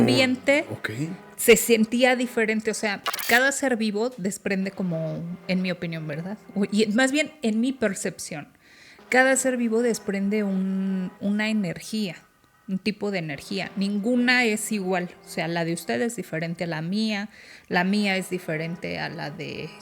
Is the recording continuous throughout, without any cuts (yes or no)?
no